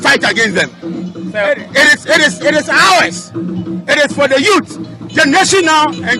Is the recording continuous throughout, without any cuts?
yes; 0 cuts

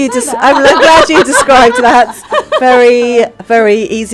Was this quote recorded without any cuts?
yes; 0 cuts

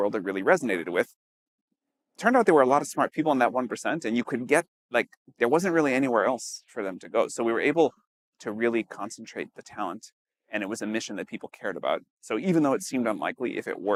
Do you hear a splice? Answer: no; 0 cuts

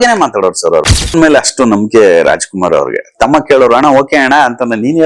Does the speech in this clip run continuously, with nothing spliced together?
no; 1 cut; at 0.9 s

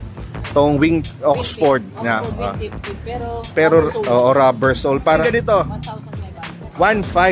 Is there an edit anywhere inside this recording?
yes; 1 cut; at 5.2 s

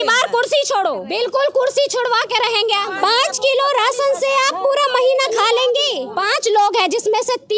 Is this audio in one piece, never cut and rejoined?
no; 3 cuts; at 1.0 s, 2.9 s, 6.1 s

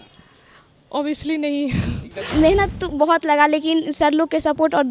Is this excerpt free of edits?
no; 1 cut; at 2.1 s

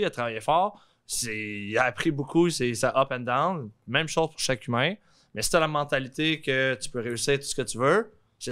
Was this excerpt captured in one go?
yes; 0 cuts

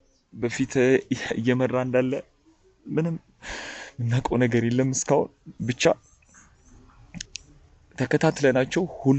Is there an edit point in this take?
no; 0 cuts

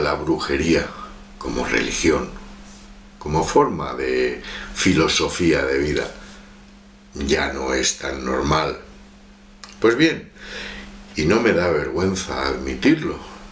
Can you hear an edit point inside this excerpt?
no; 0 cuts

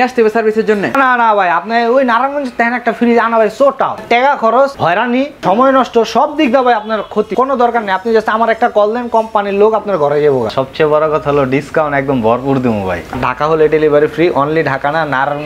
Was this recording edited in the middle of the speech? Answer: yes; 6 cuts; at 0.9 s, 4.0 s, 5.1 s, 7.3 s, 10.5 s, 13.1 s

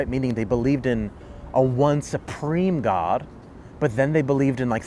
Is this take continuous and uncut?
yes; 0 cuts

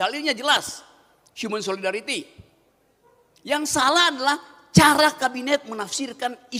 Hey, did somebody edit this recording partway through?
no; 0 cuts

